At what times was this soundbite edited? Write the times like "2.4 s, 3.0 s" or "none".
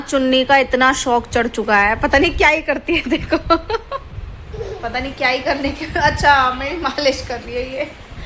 4.8 s